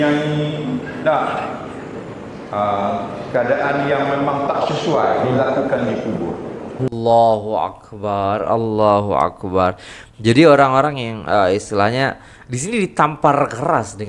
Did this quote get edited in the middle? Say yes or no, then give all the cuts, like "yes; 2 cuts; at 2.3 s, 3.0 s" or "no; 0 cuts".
yes; 1 cut; at 6.8 s